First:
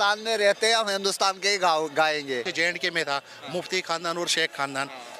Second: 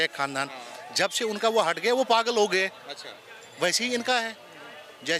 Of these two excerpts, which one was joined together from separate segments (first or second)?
first